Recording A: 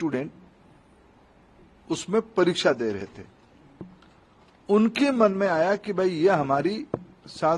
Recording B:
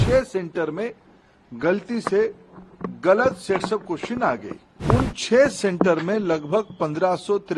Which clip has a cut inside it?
B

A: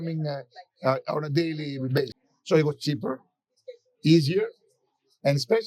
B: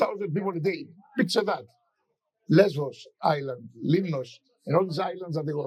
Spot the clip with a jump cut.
A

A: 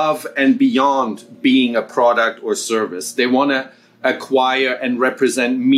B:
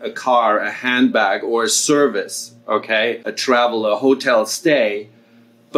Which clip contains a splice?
B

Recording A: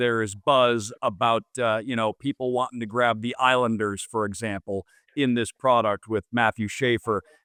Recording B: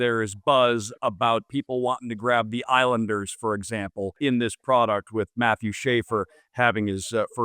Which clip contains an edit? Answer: B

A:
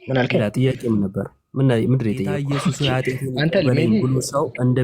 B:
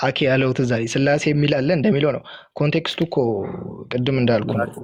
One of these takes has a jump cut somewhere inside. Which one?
A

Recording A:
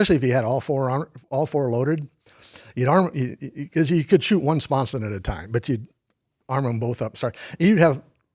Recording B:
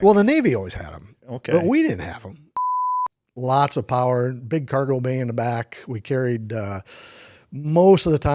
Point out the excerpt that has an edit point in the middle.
B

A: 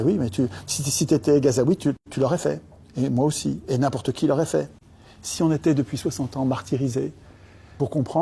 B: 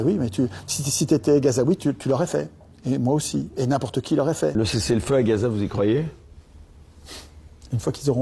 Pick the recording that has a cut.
B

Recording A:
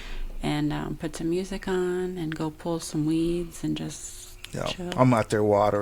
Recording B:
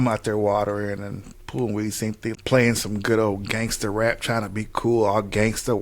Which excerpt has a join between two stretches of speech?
B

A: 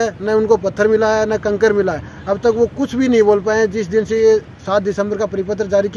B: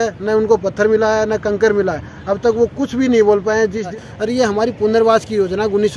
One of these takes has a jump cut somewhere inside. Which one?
B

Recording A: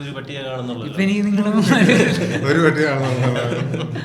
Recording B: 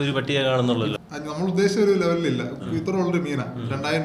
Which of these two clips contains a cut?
B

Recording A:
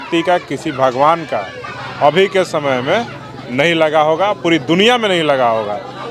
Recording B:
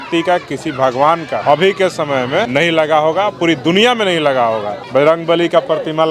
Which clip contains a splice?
B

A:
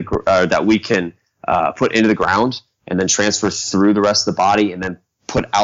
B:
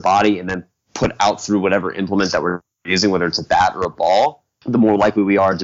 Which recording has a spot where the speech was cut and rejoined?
B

